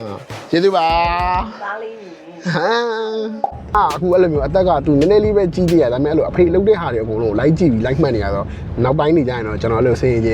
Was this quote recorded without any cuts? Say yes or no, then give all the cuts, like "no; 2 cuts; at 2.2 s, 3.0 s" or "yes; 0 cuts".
no; 1 cut; at 3.8 s